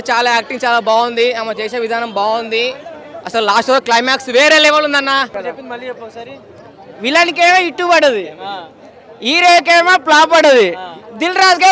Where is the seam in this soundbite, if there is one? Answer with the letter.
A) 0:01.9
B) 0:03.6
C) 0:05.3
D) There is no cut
C